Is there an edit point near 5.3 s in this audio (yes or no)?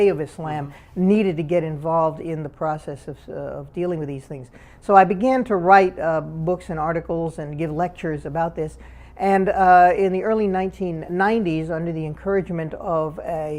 yes